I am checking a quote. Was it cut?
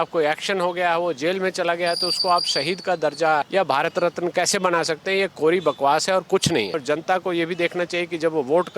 yes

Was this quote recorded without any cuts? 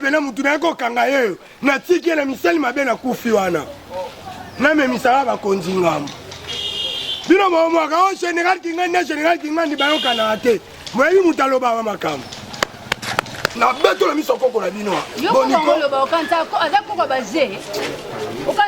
no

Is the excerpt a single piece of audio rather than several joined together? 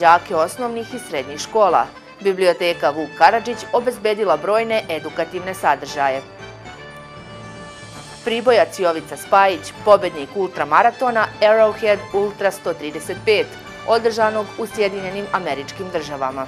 yes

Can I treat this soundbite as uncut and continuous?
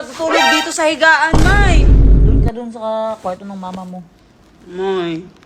yes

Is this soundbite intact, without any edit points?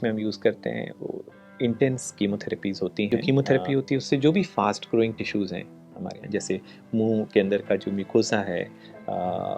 no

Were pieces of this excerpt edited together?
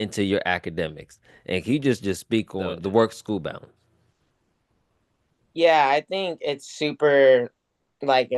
yes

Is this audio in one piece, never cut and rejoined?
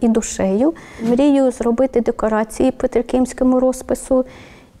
no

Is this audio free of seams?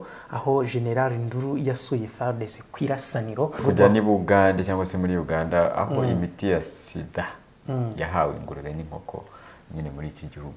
no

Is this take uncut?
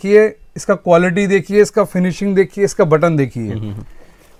yes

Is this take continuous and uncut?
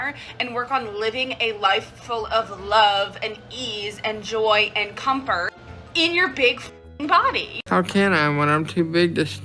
no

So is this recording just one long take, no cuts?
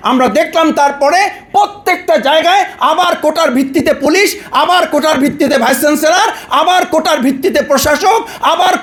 yes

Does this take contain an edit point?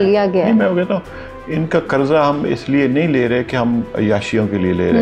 no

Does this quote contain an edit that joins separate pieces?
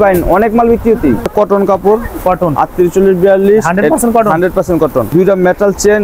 yes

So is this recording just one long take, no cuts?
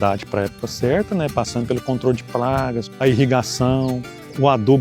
no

